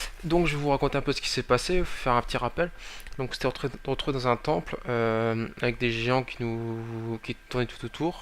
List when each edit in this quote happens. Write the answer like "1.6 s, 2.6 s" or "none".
7.2 s